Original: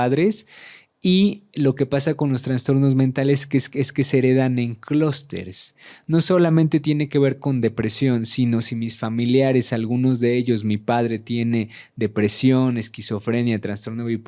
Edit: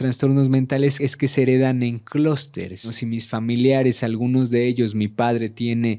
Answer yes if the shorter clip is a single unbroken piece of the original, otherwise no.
no